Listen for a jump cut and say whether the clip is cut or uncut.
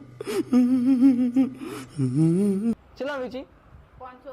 cut